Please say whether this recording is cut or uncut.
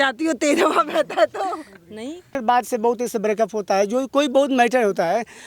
cut